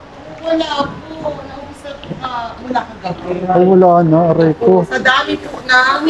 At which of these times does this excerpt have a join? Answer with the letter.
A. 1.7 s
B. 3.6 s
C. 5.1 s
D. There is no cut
D